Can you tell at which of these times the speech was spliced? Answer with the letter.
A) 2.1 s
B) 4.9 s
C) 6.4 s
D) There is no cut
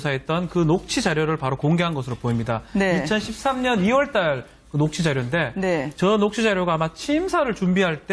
B